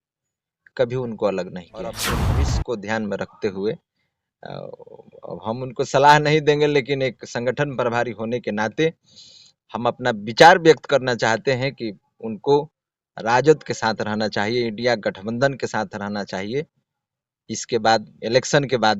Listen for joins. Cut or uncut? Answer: cut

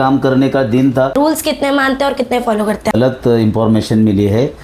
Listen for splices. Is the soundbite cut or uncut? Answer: cut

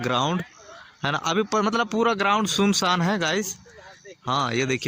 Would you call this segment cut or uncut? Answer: uncut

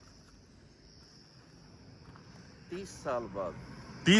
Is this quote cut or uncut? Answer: cut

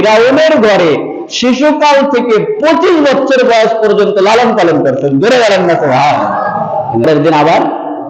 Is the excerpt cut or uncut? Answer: cut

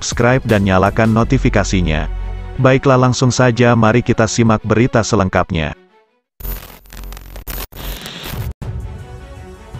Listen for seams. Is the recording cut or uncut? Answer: cut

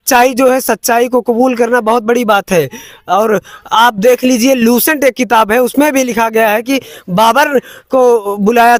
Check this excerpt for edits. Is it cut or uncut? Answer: uncut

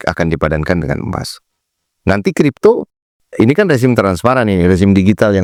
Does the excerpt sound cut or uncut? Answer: uncut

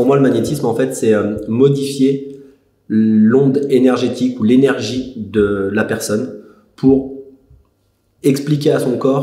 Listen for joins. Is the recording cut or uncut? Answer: uncut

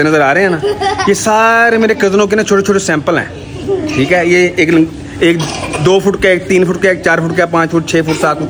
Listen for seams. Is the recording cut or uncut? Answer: uncut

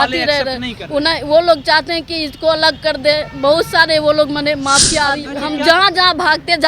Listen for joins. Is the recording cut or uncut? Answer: cut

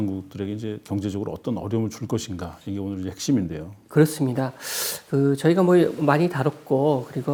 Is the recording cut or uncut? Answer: uncut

